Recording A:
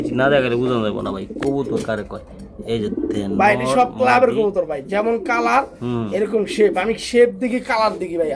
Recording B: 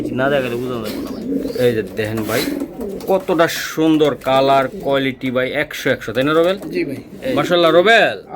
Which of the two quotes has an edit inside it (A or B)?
B